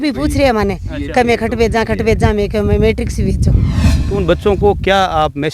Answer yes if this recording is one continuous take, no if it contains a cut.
no